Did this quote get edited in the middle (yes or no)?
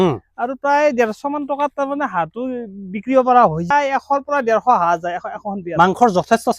yes